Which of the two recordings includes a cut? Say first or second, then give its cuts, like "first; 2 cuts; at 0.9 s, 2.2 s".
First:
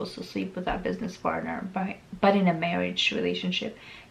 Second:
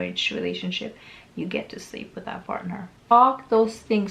second; 1 cut; at 3.1 s